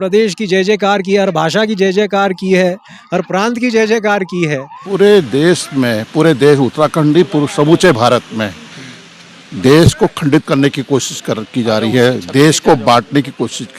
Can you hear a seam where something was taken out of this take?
yes; 1 cut; at 4.9 s

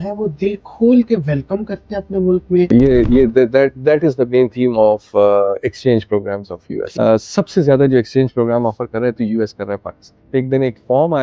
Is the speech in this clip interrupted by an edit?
yes; 3 cuts; at 2.7 s, 6.9 s, 10.1 s

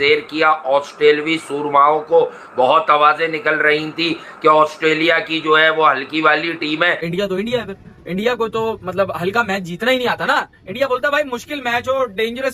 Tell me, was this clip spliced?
yes; 1 cut; at 7.0 s

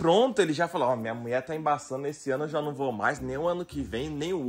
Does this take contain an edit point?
no; 0 cuts

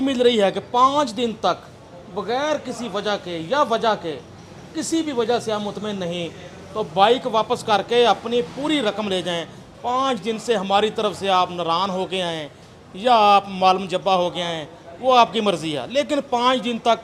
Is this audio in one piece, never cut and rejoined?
yes; 0 cuts

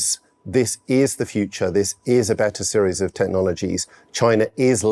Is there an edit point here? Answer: no; 0 cuts

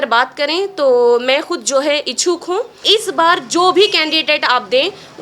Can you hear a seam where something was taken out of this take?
yes; 1 cut; at 2.8 s

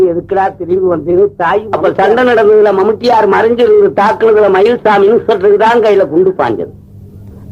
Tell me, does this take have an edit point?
yes; 1 cut; at 1.7 s

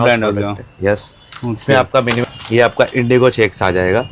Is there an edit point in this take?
yes; 1 cut; at 2.2 s

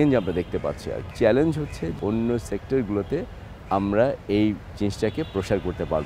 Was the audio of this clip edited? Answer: no; 0 cuts

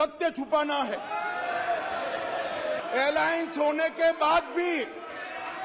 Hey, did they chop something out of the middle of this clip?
yes; 1 cut; at 2.8 s

